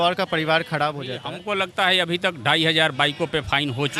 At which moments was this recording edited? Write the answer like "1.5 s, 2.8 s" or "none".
1.3 s